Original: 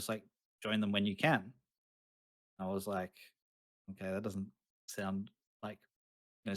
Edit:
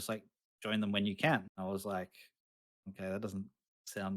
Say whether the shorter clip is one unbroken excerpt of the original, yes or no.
no